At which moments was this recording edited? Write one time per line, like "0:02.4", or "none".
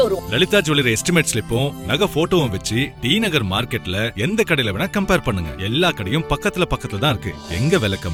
none